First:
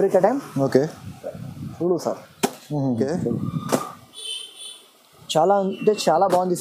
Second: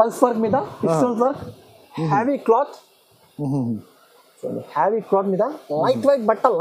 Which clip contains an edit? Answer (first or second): first